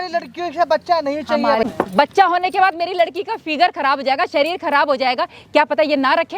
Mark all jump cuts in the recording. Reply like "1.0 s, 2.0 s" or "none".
1.7 s